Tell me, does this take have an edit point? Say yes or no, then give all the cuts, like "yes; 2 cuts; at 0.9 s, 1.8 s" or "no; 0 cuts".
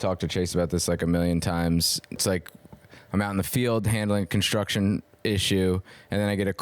yes; 1 cut; at 2.2 s